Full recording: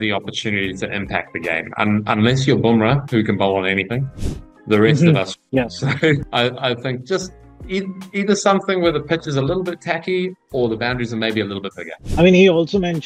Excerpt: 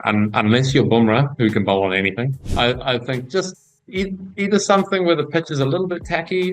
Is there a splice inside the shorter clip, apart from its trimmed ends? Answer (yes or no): yes